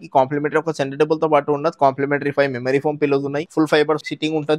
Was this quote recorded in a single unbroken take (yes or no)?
no